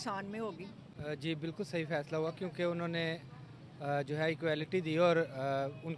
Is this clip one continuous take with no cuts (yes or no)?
no